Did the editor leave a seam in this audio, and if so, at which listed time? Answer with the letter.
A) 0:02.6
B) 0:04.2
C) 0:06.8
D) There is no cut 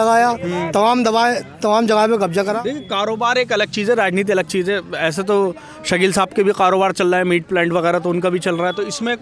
A